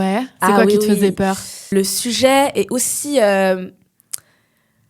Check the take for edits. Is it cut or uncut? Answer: cut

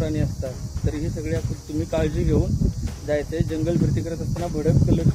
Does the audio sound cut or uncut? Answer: uncut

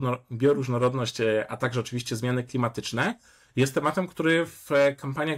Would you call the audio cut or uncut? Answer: uncut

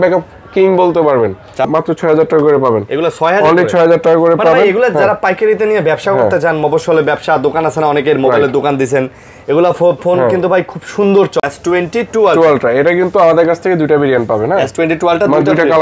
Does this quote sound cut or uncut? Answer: cut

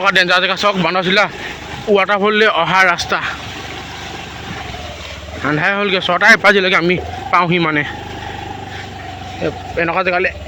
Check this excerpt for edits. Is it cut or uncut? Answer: uncut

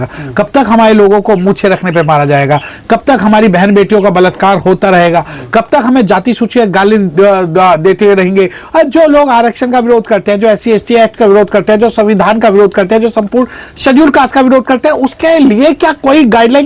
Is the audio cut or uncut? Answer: uncut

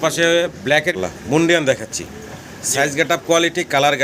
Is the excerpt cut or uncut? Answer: cut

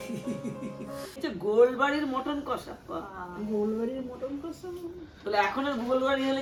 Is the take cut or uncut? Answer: uncut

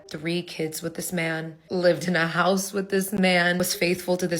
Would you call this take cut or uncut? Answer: cut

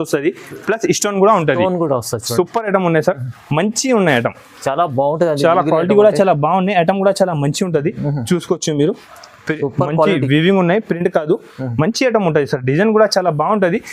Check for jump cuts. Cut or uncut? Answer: uncut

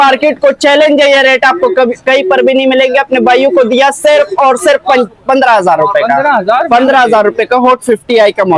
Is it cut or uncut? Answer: uncut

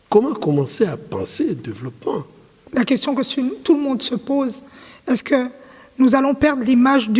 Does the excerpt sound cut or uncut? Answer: cut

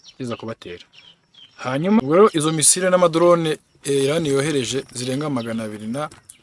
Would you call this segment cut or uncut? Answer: cut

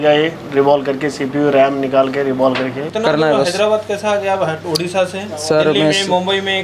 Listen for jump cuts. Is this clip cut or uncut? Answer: cut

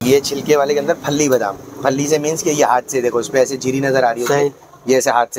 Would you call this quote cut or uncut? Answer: uncut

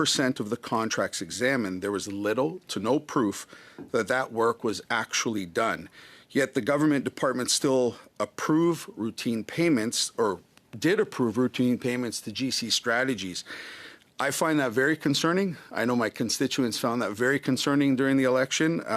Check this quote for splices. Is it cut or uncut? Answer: uncut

